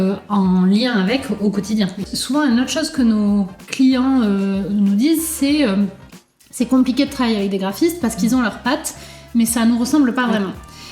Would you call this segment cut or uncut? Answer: cut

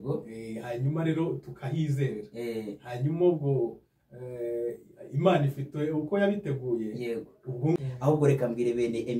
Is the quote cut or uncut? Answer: cut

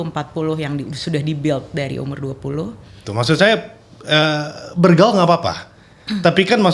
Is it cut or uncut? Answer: cut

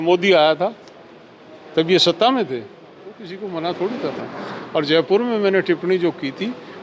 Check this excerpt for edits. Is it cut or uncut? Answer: cut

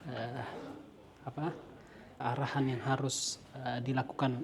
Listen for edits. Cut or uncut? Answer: uncut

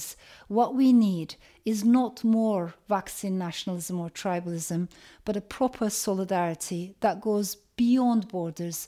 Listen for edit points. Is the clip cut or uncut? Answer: uncut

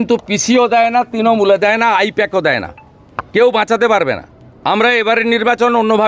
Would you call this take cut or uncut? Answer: uncut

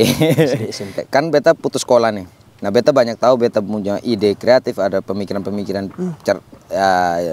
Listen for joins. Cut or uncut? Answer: cut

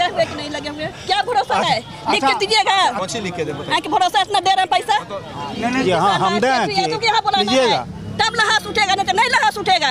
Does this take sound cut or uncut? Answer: uncut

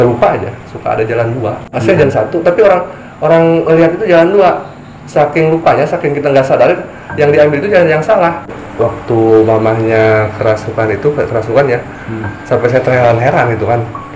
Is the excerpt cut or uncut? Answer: cut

